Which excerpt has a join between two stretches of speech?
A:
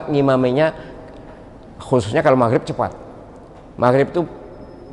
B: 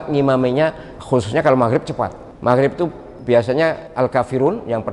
B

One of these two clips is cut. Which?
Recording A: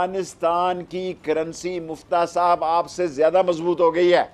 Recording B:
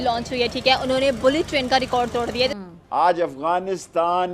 B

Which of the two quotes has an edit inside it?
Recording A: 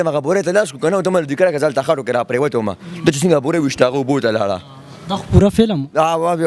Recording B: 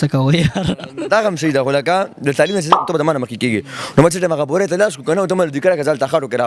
B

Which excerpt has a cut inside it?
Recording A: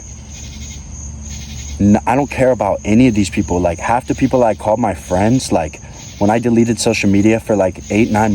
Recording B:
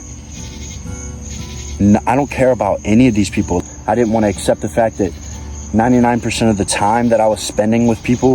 B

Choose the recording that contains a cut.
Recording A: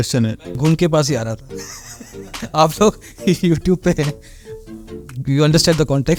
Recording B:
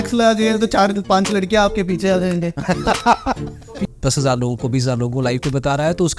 B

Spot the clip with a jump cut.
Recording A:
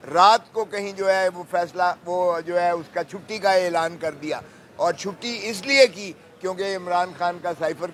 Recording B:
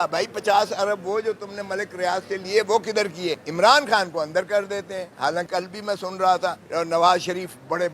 B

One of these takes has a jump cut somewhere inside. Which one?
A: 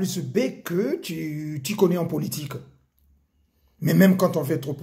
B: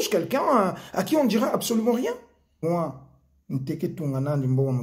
B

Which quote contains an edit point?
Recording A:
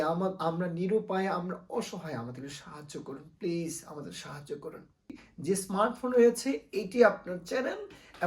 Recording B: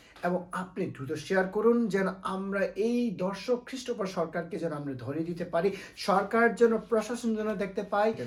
A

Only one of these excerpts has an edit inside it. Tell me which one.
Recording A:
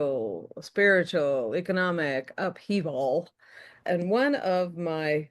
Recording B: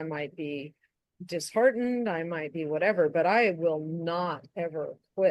A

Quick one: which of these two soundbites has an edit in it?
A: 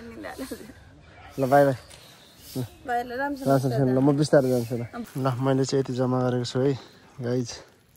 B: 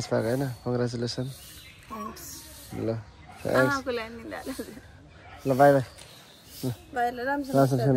A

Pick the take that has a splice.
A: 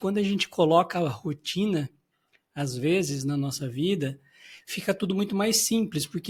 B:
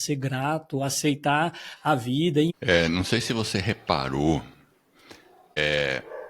B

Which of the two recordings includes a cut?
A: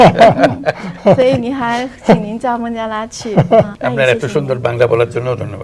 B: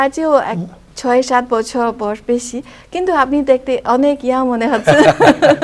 A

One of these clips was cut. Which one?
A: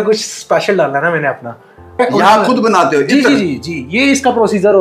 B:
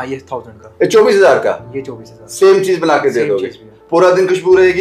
A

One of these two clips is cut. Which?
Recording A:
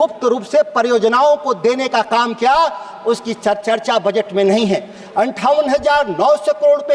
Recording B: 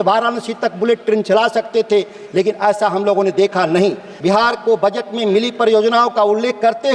B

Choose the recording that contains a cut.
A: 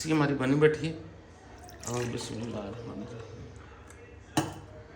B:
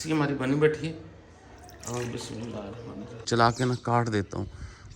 B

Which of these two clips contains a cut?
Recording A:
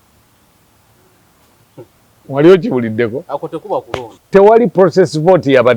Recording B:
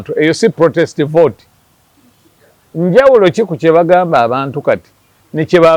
A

